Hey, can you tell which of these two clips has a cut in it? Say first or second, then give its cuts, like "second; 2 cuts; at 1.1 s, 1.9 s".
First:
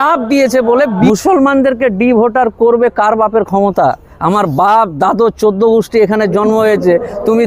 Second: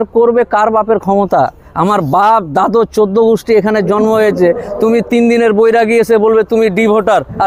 first; 1 cut; at 1.1 s